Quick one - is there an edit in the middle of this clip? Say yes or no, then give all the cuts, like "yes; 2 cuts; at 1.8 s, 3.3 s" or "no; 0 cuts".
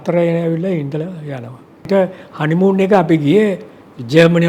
yes; 1 cut; at 1.9 s